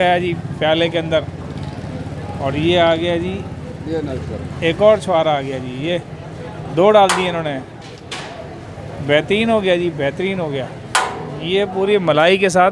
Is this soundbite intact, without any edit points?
yes; 0 cuts

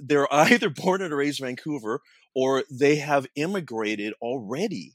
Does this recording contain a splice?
no; 0 cuts

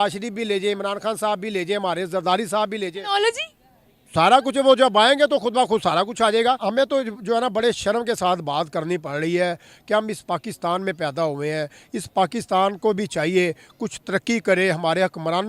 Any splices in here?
yes; 1 cut; at 6.6 s

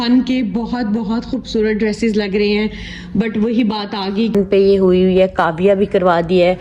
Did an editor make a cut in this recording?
yes; 1 cut; at 4.3 s

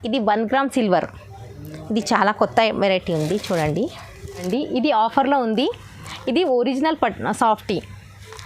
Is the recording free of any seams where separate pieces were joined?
no; 1 cut; at 4.4 s

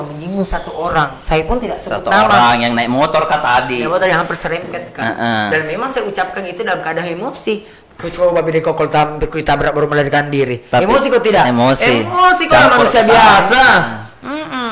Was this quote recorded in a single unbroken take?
yes; 0 cuts

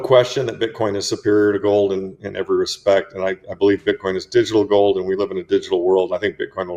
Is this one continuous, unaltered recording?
yes; 0 cuts

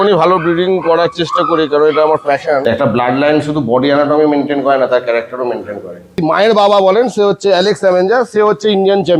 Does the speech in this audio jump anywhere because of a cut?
yes; 2 cuts; at 2.6 s, 6.1 s

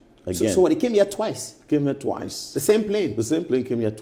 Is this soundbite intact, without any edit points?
yes; 0 cuts

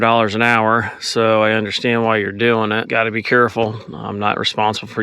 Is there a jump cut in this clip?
yes; 1 cut; at 2.9 s

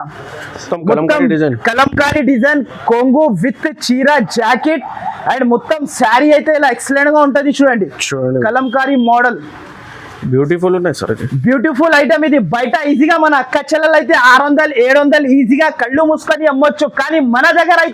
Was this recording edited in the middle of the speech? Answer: no; 0 cuts

